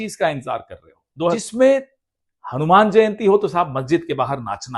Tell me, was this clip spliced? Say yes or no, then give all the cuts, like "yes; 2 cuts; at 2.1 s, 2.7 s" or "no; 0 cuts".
yes; 1 cut; at 1.4 s